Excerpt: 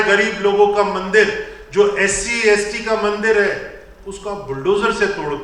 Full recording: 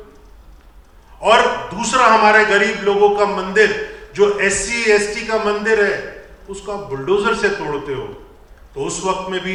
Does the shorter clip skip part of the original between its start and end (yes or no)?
no